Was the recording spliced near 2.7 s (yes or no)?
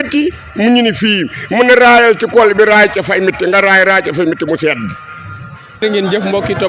no